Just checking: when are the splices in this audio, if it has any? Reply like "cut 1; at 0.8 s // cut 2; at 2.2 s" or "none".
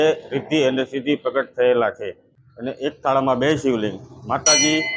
cut 1; at 1.8 s